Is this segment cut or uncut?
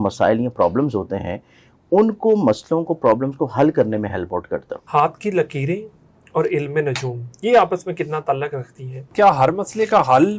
cut